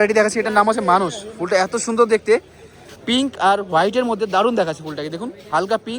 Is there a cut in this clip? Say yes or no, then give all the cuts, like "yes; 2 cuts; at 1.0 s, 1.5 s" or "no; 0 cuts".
no; 0 cuts